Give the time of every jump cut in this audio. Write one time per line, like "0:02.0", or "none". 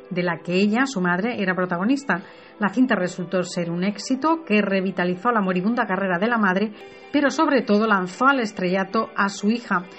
0:01.1